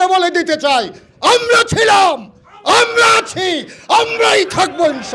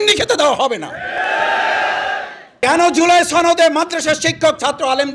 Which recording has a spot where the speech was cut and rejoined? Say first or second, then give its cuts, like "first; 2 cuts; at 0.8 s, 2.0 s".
second; 1 cut; at 2.6 s